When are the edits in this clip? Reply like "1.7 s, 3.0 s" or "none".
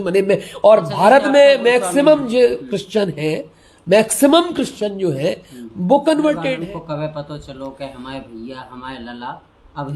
6.5 s

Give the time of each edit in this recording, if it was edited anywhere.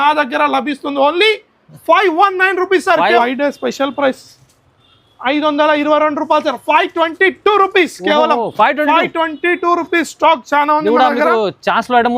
3.2 s

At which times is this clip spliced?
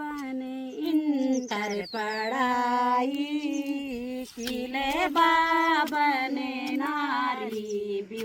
none

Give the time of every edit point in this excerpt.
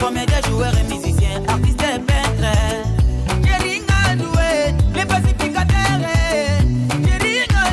none

